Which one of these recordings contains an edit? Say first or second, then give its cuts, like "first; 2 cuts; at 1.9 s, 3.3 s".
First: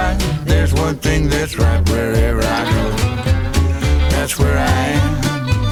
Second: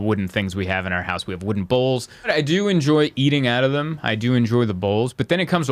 second; 1 cut; at 2.3 s